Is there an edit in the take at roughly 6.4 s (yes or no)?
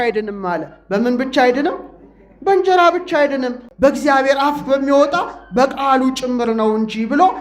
no